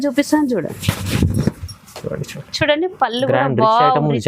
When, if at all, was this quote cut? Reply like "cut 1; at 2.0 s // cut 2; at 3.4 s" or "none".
none